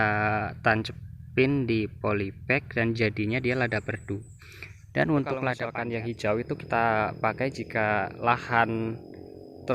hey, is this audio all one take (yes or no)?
no